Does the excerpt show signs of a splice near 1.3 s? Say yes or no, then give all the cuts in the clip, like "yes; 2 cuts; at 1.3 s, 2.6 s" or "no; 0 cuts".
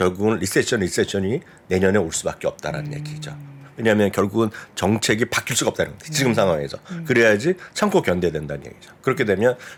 no; 0 cuts